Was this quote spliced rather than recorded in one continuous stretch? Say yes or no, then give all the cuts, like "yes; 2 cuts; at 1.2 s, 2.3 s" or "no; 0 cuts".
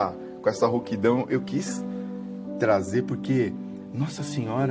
no; 0 cuts